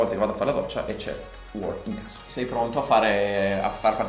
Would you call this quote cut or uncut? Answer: cut